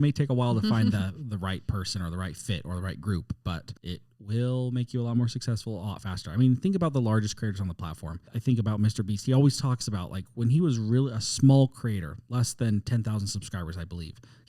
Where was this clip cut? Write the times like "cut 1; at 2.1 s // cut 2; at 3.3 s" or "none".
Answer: cut 1; at 8.3 s

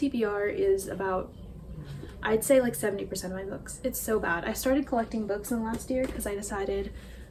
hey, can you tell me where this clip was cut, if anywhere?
none

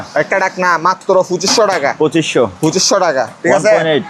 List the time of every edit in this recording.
none

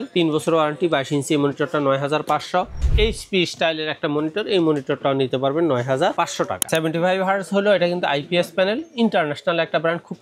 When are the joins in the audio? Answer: cut 1; at 2.9 s // cut 2; at 6.6 s

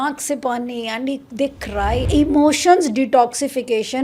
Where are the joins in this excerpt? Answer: cut 1; at 2.0 s

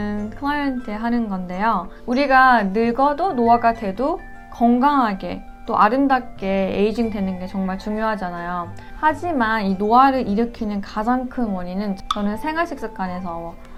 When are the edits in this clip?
none

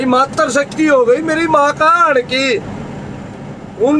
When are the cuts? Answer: none

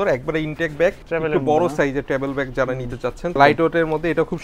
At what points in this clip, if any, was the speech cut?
cut 1; at 1.0 s // cut 2; at 3.4 s

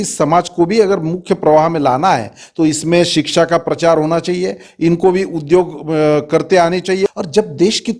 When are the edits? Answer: cut 1; at 7.1 s

